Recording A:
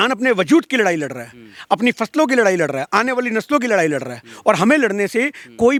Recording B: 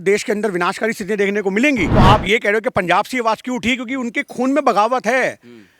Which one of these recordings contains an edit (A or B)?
B